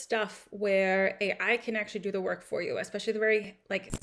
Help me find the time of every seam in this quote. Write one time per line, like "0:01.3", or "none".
none